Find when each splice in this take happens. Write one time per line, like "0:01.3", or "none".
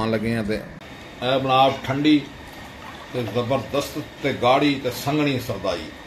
0:00.9

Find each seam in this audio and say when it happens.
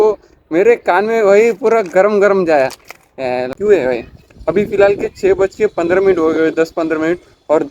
0:03.5

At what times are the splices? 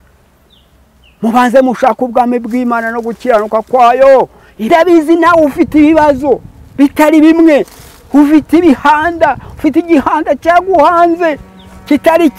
0:04.7

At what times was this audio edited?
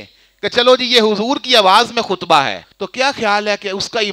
0:02.7

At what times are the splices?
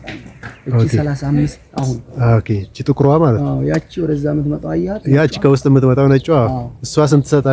none

